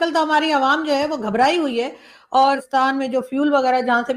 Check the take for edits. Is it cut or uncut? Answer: cut